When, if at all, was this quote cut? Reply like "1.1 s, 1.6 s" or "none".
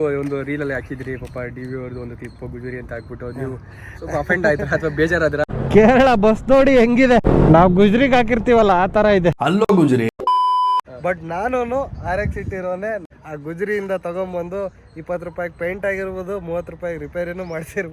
5.4 s, 7.3 s, 10.9 s, 13.0 s